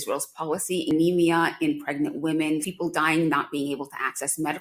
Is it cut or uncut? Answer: cut